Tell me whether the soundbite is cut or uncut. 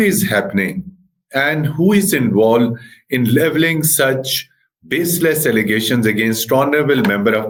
uncut